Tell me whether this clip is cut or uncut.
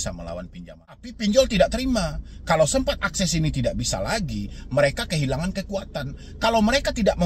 cut